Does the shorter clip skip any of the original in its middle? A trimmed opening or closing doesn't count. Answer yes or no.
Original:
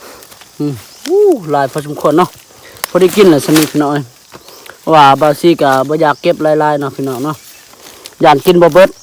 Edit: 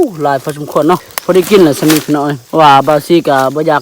yes